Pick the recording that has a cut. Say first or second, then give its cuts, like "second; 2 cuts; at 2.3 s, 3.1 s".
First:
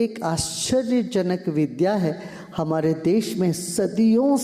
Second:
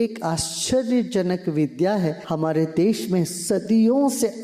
second; 1 cut; at 2.2 s